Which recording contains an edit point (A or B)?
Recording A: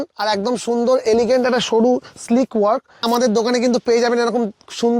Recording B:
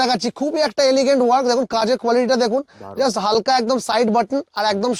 A